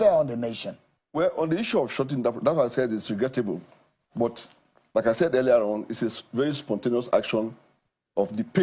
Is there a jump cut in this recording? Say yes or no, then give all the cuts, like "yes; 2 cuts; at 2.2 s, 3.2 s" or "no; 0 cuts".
no; 0 cuts